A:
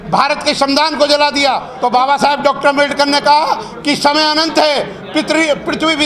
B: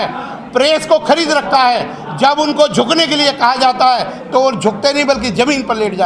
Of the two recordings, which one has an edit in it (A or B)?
A